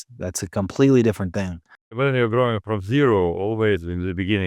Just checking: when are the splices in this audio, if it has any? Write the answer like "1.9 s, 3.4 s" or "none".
2.0 s